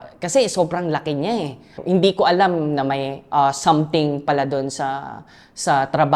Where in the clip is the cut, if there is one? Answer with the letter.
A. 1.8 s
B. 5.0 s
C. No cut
A